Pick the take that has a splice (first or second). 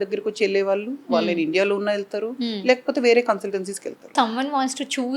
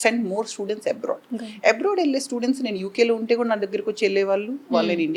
first